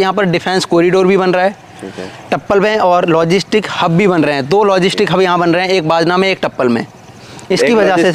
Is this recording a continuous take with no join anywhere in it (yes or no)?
yes